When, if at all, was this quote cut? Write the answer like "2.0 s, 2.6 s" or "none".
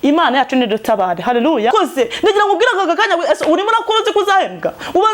1.7 s